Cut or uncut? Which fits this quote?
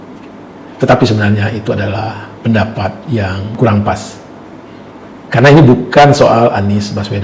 cut